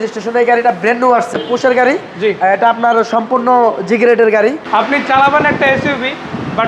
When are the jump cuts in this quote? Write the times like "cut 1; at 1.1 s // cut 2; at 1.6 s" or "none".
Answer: cut 1; at 1.3 s // cut 2; at 4.6 s